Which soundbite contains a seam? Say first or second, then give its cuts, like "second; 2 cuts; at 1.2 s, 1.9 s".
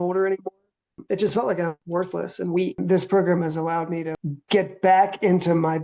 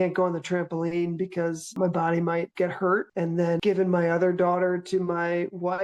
first; 2 cuts; at 2.8 s, 4.1 s